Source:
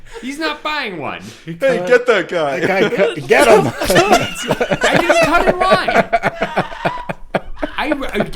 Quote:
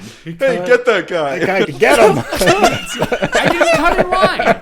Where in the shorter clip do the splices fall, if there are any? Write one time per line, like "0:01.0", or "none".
0:01.7